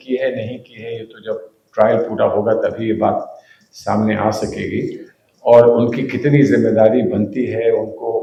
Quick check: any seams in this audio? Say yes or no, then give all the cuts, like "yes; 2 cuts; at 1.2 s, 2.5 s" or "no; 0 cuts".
no; 0 cuts